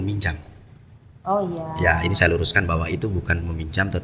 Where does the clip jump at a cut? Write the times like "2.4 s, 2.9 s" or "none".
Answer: none